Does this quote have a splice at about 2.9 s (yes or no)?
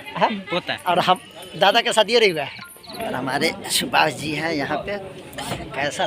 yes